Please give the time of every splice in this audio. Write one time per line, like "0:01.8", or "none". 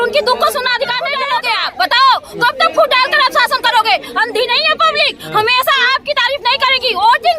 0:01.1